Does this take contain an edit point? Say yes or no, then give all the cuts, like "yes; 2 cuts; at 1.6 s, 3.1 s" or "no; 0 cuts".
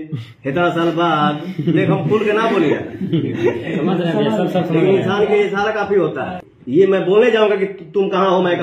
yes; 1 cut; at 6.3 s